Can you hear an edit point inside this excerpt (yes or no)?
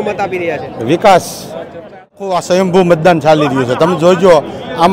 yes